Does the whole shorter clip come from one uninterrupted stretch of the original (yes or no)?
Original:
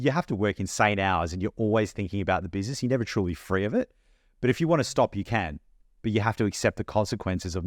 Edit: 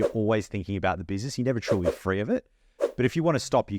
yes